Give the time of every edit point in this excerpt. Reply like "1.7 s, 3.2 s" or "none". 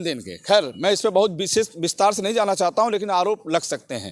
none